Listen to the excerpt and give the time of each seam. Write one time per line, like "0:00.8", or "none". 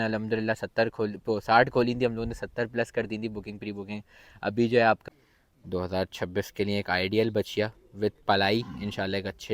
0:05.0